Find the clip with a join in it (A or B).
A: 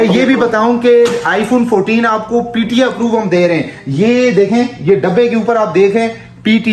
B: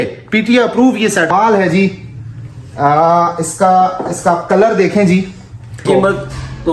B